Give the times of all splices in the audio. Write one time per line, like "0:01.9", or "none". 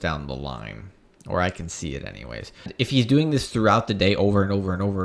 0:02.7